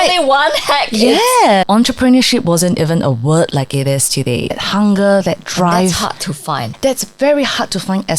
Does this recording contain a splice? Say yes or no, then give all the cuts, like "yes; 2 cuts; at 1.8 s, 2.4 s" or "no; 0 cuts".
yes; 3 cuts; at 1.6 s, 4.6 s, 6.7 s